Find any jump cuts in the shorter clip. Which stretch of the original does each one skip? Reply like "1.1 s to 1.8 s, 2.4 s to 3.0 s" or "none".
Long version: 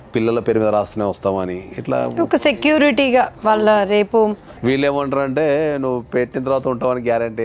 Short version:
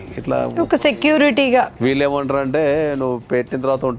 3.3 s to 4.6 s